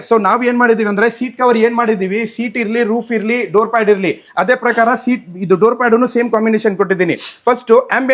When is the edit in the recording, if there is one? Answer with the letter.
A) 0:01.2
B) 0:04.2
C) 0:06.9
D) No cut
D